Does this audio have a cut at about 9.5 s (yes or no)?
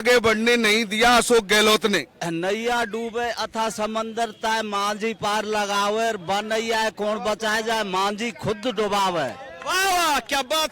no